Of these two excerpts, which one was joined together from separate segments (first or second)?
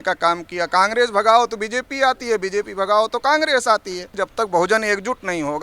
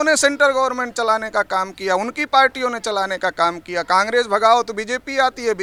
first